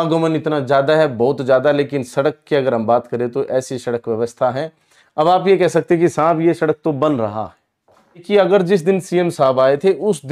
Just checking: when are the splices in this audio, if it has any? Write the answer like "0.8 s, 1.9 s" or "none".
8.2 s